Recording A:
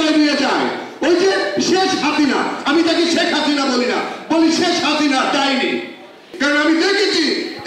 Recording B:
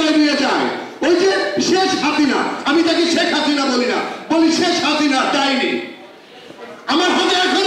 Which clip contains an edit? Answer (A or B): A